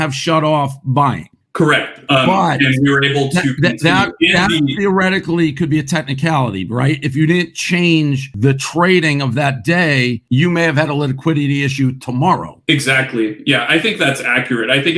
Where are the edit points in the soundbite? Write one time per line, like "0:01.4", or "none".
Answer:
0:02.0